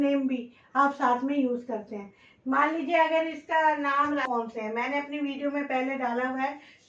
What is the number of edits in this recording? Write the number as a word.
one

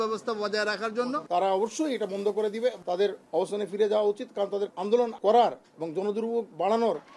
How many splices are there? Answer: three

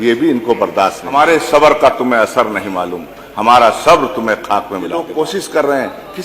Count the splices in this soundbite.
two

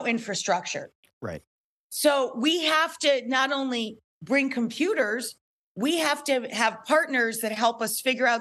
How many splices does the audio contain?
zero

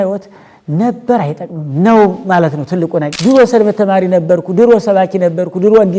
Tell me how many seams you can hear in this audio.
one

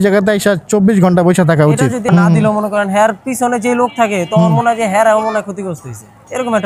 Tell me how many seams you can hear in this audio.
one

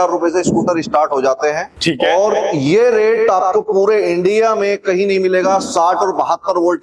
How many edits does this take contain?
one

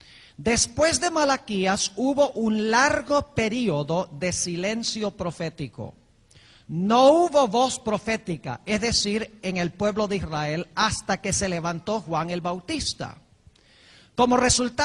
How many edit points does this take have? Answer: one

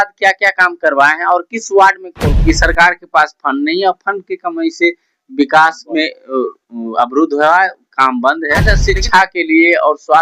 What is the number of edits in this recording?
two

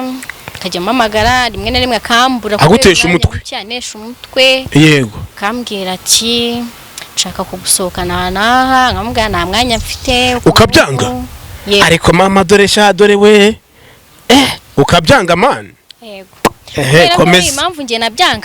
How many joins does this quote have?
zero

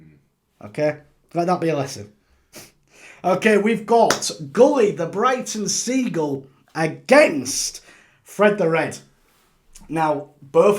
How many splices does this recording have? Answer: zero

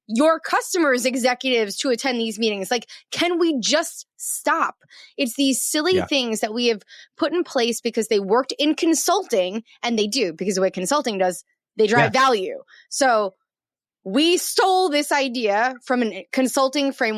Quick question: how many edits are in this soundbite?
zero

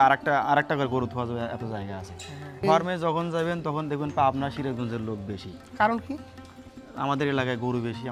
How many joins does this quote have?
zero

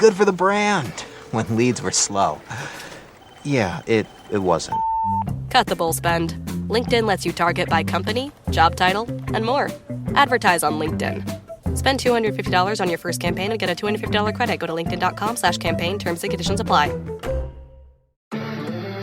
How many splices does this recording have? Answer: one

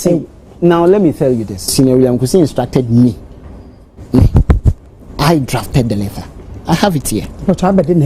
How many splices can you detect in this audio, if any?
one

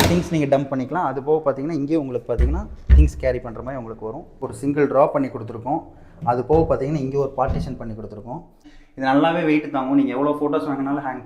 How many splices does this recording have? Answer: two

